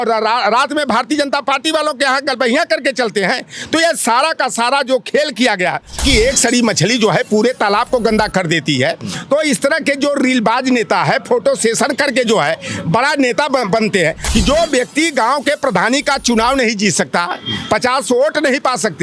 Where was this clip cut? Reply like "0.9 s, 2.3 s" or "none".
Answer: 6.0 s, 14.2 s